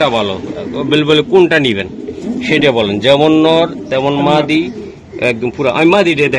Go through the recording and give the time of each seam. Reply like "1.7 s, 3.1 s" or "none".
none